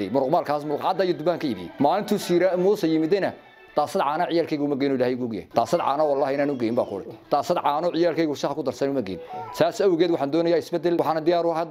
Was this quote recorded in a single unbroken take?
no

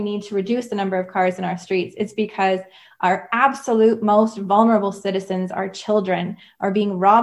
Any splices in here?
no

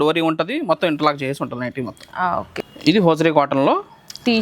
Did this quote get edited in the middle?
yes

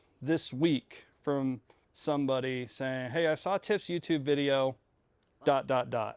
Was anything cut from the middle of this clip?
no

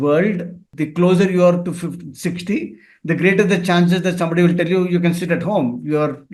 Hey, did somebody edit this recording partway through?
no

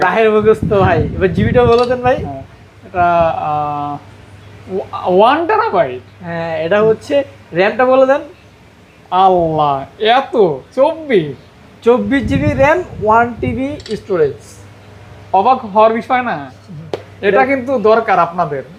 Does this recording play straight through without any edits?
yes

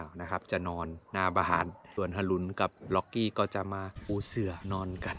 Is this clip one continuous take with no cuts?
no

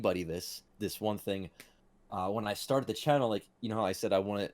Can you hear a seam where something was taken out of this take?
no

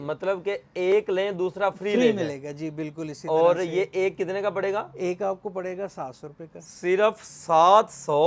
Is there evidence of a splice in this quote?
no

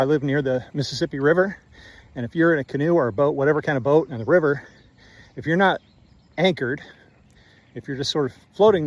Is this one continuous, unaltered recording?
no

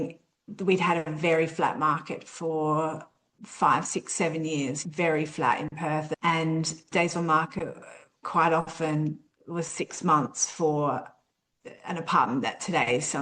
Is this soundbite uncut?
yes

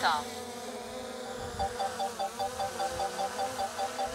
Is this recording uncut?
yes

